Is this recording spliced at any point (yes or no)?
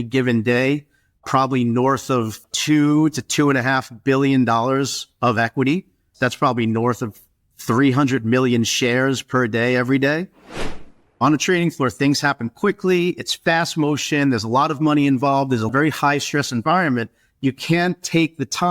yes